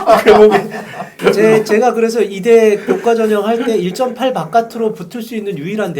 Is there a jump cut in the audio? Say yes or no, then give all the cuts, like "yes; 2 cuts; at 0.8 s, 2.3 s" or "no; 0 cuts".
yes; 1 cut; at 1.1 s